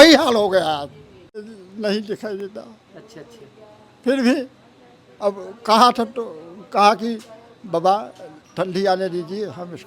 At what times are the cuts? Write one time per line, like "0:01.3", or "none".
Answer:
0:01.6